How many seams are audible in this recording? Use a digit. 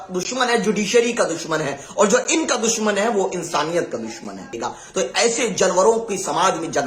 1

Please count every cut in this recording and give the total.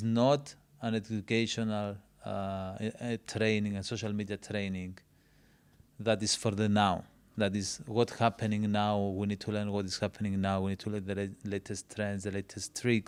0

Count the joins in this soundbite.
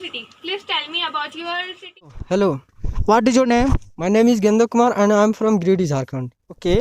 1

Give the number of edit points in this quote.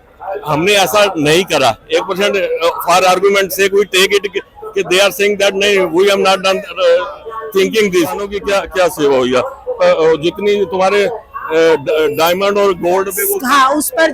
1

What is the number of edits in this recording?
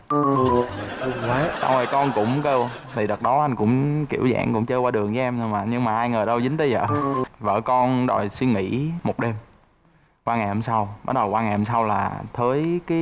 1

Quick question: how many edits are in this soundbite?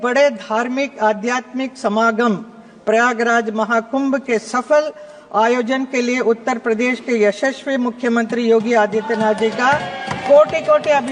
0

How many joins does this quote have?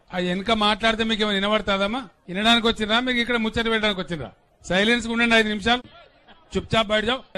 0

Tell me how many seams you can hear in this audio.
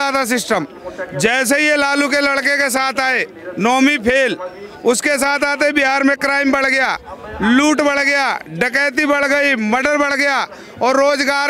0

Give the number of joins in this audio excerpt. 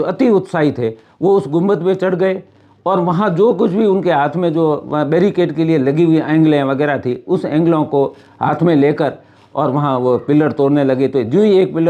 0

